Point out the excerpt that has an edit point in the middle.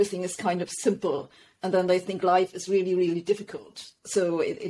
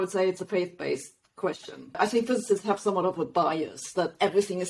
second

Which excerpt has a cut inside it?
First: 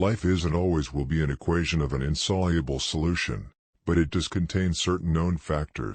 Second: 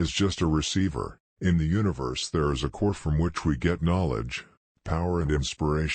second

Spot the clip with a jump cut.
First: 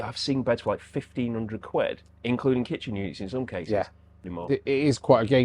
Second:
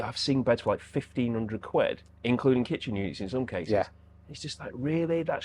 first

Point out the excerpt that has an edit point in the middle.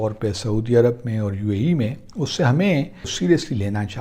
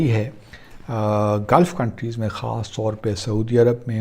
first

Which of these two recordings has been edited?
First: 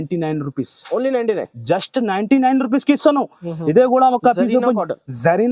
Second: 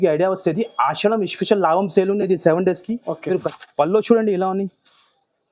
second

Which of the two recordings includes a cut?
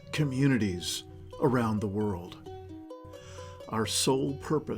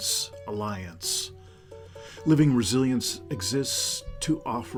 first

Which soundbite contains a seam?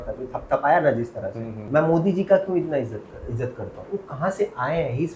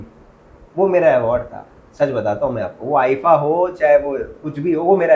first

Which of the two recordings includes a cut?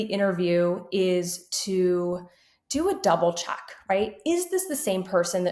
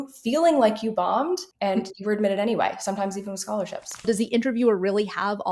second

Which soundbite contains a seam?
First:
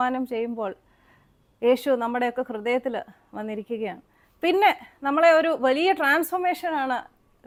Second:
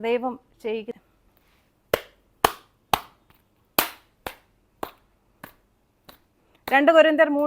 second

